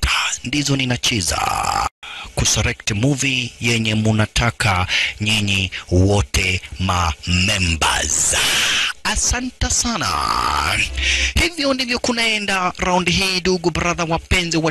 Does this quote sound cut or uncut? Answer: uncut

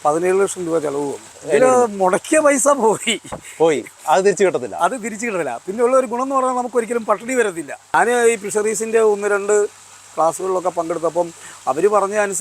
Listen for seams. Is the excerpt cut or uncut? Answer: cut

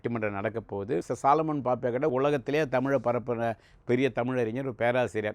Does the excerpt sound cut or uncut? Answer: cut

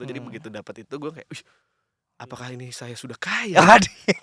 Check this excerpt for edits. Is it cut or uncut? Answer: uncut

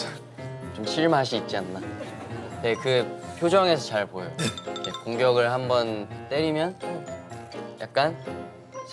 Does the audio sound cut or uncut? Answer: uncut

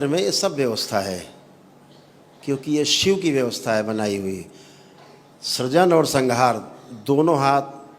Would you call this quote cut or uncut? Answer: uncut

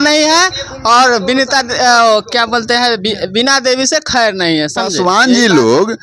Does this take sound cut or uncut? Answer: cut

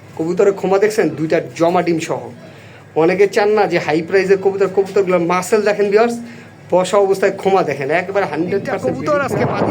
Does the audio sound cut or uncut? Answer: cut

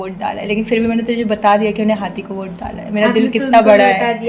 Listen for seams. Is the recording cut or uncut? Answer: uncut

